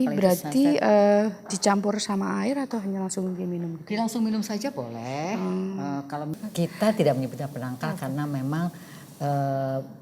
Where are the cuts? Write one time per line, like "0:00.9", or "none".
0:06.4

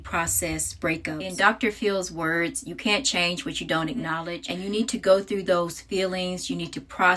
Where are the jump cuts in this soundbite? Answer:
0:01.3
0:04.4

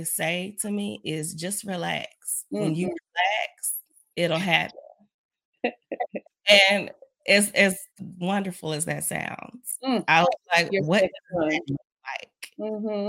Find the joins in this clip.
none

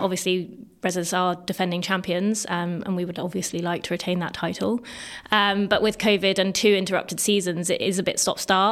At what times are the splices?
none

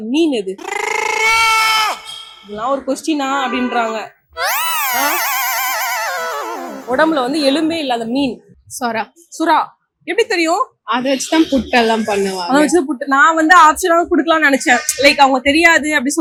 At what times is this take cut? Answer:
none

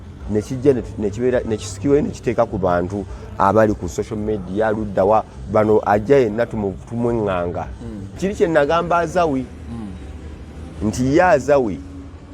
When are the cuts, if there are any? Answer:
0:08.2

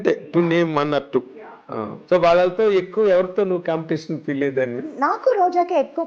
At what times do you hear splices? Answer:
0:01.9
0:04.9

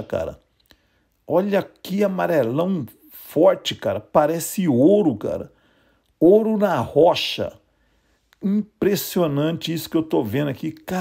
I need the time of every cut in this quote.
none

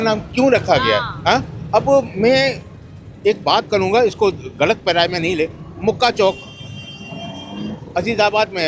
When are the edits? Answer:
none

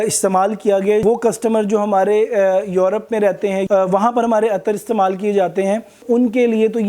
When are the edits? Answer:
0:01.0
0:03.6
0:06.0

